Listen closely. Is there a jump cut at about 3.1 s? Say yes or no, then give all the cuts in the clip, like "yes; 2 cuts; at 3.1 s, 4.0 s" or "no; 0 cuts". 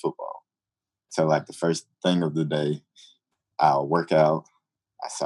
no; 1 cut; at 1.9 s